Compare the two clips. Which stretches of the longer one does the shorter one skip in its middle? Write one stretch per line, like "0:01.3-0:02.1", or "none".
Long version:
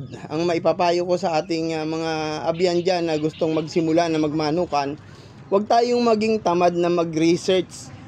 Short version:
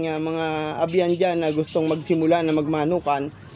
none